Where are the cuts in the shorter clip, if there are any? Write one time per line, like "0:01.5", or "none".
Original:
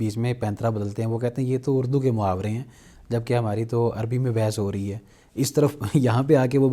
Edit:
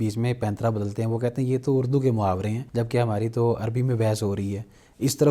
0:02.6